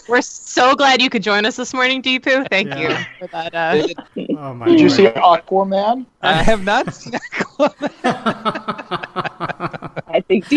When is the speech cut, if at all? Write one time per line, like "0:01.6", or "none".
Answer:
0:04.1
0:06.1